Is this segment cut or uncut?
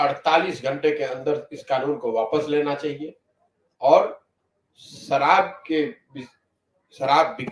uncut